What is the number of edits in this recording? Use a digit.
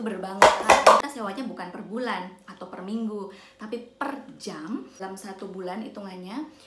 2